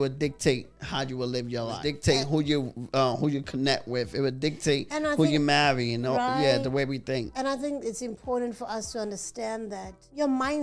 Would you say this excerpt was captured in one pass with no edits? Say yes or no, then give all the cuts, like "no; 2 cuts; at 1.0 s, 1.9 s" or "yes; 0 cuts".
yes; 0 cuts